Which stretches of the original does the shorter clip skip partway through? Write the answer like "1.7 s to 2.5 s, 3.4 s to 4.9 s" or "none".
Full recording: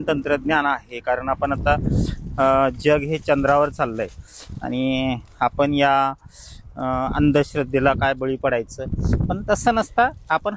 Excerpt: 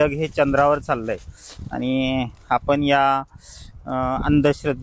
none